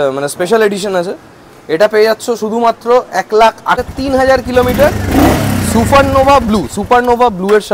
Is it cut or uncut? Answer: cut